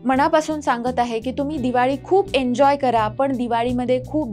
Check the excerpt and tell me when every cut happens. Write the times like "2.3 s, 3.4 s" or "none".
none